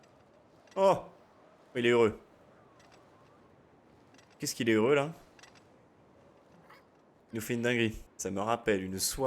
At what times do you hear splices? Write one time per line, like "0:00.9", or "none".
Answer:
0:07.2
0:08.1